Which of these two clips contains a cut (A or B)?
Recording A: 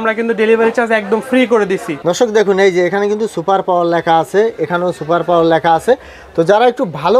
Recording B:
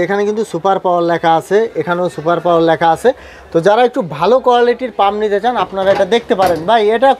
A